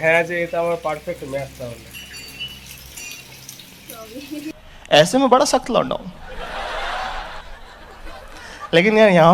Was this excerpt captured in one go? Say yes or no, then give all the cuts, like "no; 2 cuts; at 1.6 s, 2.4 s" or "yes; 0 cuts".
yes; 0 cuts